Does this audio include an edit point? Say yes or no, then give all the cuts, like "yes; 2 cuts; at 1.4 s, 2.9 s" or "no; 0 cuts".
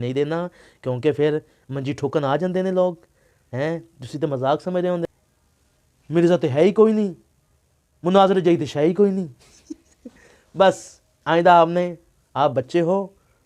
yes; 1 cut; at 5.0 s